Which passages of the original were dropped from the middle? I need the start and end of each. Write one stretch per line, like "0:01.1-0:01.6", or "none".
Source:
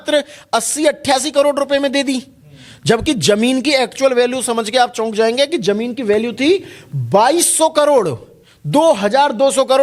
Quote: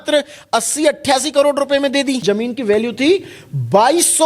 0:02.2-0:05.6